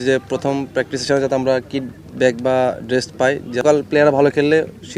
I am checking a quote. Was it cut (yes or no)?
yes